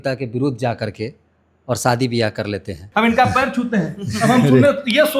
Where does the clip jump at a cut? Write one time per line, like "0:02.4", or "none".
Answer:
0:02.8